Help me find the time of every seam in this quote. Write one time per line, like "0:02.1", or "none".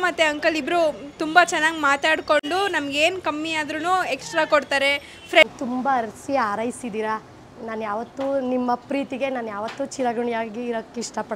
0:05.4